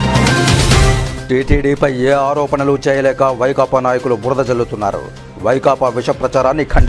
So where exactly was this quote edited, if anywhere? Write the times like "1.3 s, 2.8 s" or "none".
1.1 s